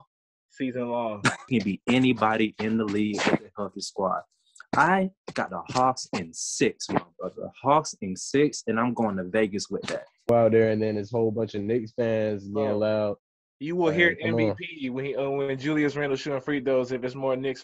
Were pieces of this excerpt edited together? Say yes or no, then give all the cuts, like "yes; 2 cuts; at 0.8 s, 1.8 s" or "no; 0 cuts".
yes; 2 cuts; at 1.5 s, 10.3 s